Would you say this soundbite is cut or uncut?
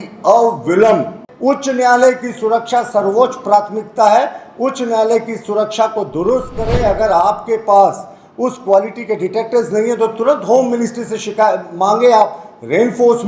cut